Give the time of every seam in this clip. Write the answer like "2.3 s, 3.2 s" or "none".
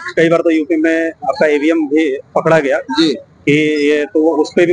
none